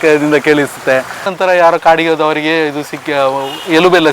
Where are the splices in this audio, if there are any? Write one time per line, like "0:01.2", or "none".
0:01.3